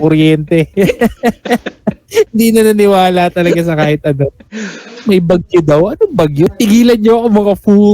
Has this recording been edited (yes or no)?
yes